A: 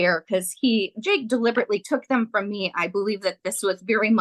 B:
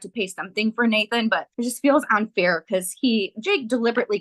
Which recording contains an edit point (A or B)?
B